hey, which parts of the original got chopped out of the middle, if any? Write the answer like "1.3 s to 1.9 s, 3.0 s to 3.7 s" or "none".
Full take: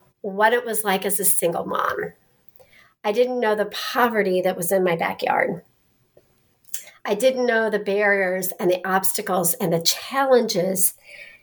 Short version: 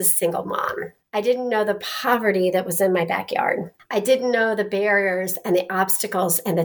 2.1 s to 2.8 s, 5.7 s to 6.9 s